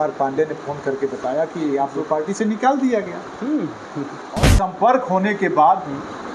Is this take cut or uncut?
cut